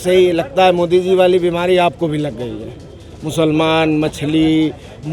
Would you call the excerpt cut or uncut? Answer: uncut